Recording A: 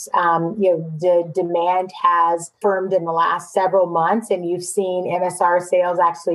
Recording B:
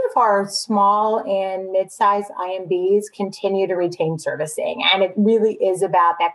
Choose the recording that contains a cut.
A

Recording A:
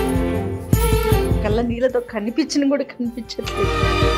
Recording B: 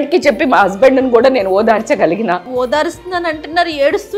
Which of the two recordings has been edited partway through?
B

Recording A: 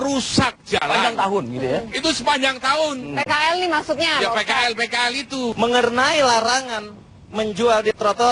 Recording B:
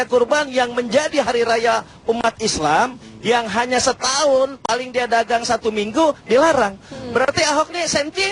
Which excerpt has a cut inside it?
A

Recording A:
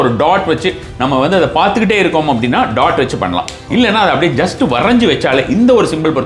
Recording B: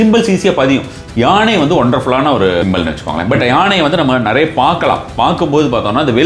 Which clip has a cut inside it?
B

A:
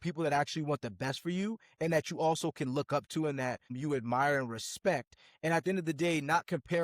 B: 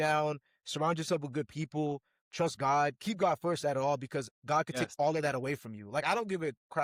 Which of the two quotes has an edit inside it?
A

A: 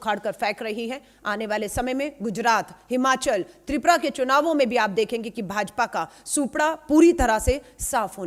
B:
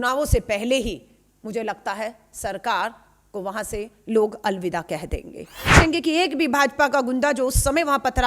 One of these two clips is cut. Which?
B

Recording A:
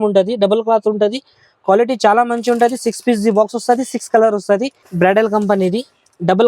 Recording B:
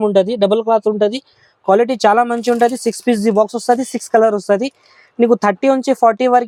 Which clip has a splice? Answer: A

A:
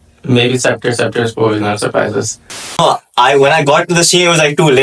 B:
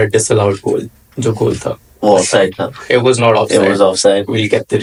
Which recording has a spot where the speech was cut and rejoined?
A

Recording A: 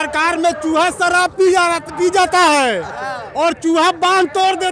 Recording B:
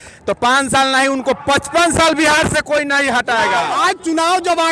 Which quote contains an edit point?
B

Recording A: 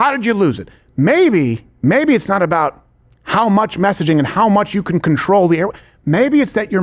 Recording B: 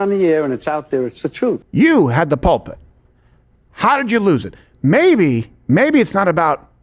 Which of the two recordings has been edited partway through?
B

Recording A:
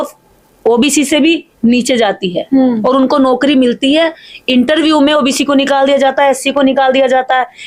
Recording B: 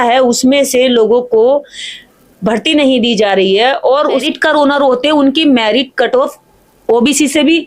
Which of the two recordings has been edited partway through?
B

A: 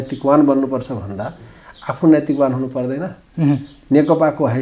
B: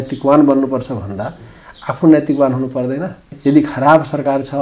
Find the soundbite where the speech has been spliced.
B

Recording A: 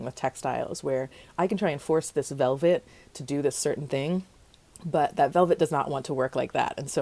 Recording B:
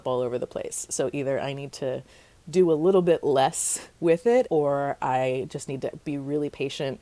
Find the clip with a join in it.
B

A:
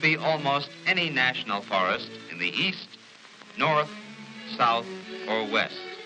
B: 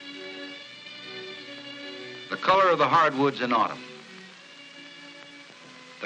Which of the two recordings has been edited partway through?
A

